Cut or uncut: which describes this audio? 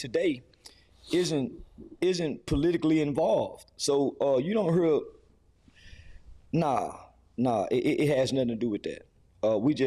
uncut